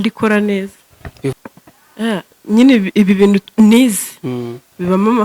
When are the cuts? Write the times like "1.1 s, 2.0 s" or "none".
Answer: 1.3 s